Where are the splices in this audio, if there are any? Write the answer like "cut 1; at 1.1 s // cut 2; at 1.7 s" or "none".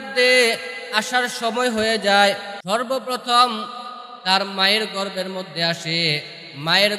cut 1; at 2.5 s